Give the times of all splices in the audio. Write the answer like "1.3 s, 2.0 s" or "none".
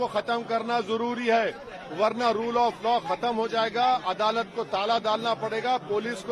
none